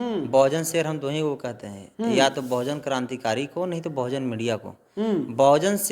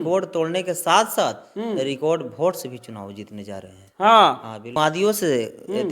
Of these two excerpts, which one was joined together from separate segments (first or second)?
second